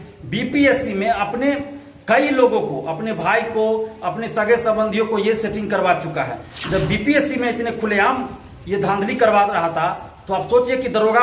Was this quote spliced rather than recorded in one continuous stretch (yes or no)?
no